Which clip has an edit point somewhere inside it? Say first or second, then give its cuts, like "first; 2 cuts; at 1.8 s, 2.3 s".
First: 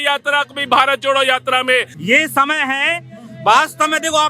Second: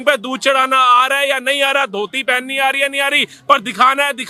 first; 1 cut; at 1.9 s